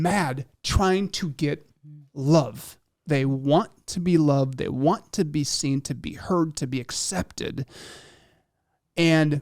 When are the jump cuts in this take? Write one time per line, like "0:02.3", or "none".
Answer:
0:02.9